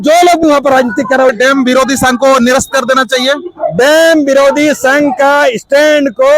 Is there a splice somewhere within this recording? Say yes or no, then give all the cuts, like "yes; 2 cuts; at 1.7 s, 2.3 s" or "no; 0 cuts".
yes; 1 cut; at 1.3 s